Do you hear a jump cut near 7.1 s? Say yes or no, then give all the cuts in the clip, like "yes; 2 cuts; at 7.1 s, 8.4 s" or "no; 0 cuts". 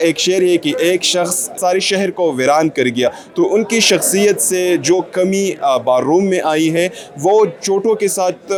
no; 0 cuts